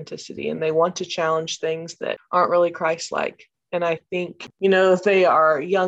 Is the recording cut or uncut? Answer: cut